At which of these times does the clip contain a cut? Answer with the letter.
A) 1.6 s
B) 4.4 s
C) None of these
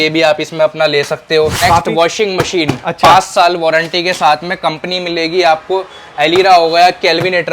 A